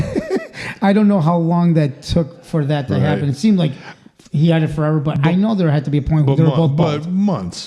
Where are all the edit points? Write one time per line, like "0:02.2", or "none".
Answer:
none